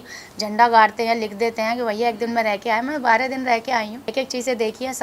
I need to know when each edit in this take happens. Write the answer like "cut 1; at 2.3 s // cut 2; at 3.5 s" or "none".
cut 1; at 4.0 s